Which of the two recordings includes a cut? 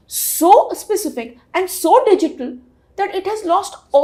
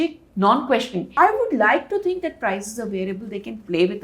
second; 1 cut; at 1.1 s

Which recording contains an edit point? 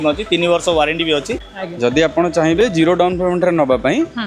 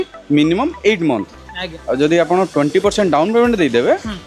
first; 1 cut; at 1.5 s

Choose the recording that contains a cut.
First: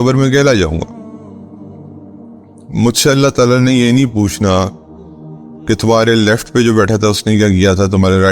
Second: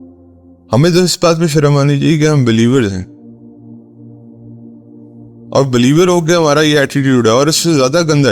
second; 2 cuts; at 3.4 s, 5.5 s

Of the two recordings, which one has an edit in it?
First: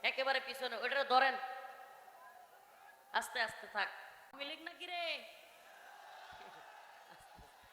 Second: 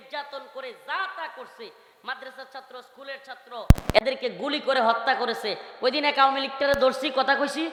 first; 1 cut; at 4.5 s

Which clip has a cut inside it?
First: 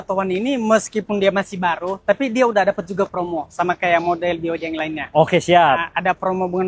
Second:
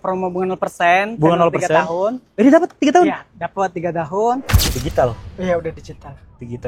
second; 1 cut; at 4.6 s

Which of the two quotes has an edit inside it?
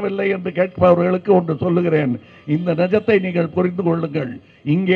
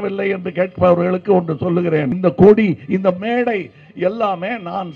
second; 1 cut; at 2.1 s

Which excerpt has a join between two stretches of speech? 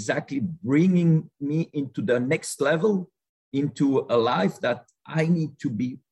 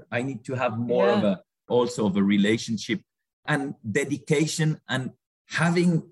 second; 2 cuts; at 1.7 s, 5.2 s

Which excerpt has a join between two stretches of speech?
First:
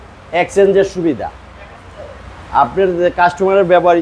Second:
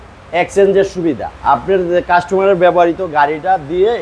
second; 1 cut; at 1.3 s

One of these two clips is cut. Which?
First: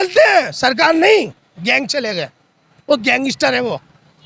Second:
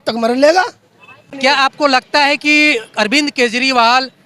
second; 1 cut; at 1.3 s

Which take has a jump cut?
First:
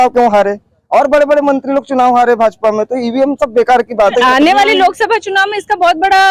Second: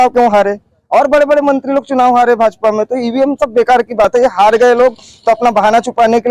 first; 1 cut; at 4.1 s

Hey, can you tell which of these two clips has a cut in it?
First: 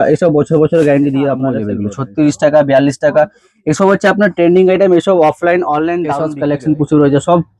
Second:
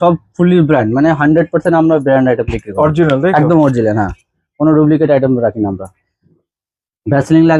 first; 2 cuts; at 1.8 s, 6.2 s

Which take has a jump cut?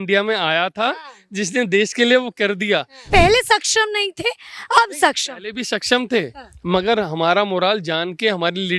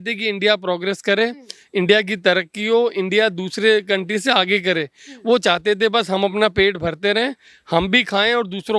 first; 1 cut; at 3.1 s

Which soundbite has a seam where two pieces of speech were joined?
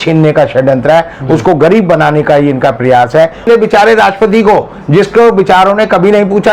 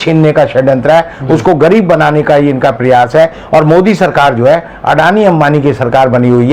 first; 1 cut; at 3.5 s

